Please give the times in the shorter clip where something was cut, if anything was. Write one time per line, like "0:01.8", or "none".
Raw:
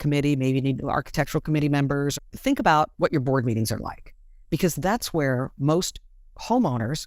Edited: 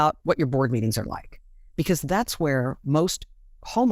none